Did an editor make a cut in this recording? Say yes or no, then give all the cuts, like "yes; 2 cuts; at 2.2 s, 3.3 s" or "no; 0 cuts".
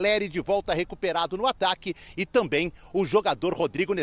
no; 0 cuts